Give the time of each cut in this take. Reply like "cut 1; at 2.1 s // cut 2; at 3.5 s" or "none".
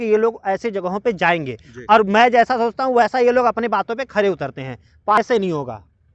cut 1; at 5.2 s